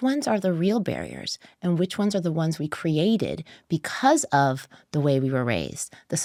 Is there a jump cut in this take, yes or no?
no